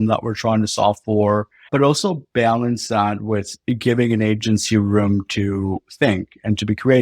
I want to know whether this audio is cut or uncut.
cut